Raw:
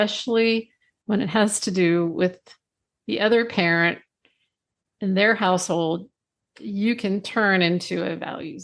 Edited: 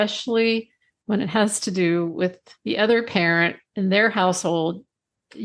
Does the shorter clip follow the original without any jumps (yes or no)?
no